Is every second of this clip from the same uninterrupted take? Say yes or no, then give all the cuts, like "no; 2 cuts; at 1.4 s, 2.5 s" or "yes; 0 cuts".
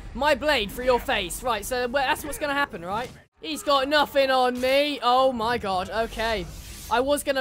no; 1 cut; at 2.8 s